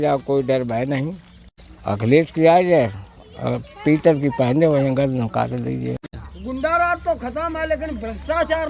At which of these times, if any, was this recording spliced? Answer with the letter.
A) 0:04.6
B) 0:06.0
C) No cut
B